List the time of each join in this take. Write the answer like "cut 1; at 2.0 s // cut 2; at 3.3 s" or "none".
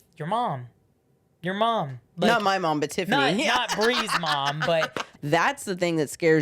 cut 1; at 5.0 s

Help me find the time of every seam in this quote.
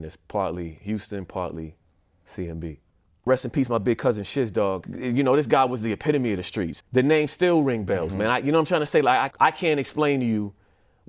cut 1; at 3.3 s

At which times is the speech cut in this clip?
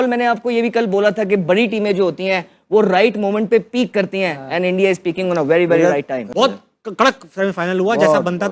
cut 1; at 6.3 s

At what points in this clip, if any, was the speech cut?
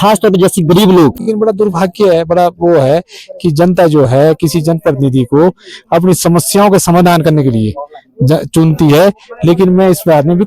cut 1; at 1.3 s

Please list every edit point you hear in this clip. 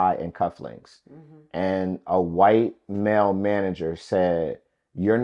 none

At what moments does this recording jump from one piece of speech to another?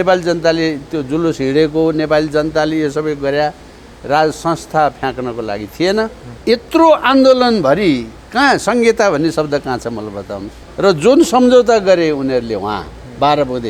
cut 1; at 6.3 s // cut 2; at 10.6 s

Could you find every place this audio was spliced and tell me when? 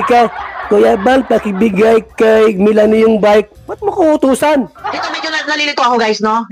cut 1; at 4.8 s

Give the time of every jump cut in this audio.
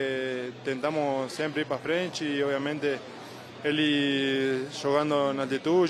none

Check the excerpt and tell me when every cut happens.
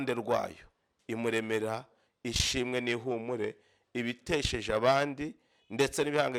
none

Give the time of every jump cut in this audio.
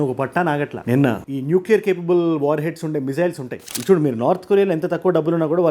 cut 1; at 3.7 s

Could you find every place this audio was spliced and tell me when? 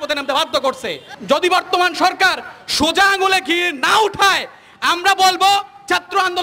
cut 1; at 1.1 s

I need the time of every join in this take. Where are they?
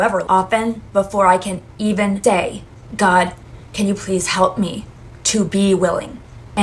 none

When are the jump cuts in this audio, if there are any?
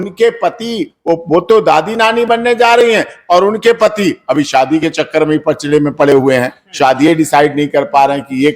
none

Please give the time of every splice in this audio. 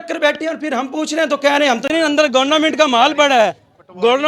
cut 1; at 1.9 s

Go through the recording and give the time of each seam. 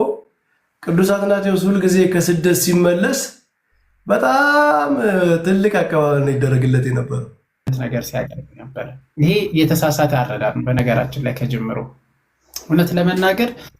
cut 1; at 7.7 s

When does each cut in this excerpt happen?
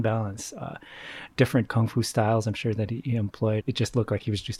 cut 1; at 1.7 s // cut 2; at 3.6 s

